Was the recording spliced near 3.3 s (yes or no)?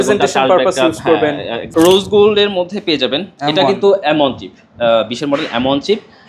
no